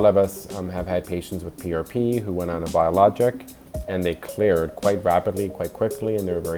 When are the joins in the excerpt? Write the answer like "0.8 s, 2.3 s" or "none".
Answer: none